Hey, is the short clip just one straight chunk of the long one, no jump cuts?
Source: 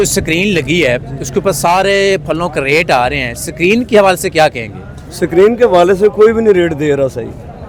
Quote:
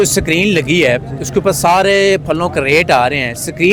yes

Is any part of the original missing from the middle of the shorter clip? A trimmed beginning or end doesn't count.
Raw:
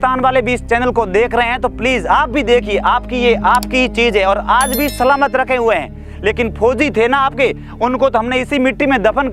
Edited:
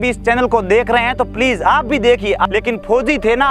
yes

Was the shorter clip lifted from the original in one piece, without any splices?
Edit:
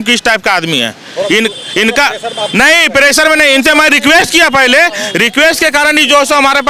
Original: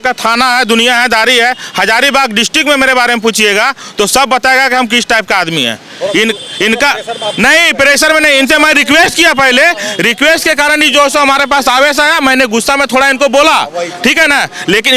yes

